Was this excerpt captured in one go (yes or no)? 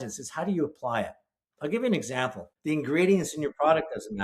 no